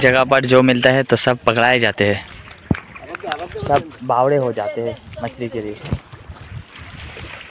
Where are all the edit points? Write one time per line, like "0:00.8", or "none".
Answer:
none